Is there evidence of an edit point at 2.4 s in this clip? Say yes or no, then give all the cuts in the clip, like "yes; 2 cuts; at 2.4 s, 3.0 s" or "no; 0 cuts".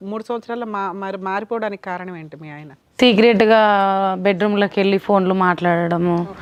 no; 0 cuts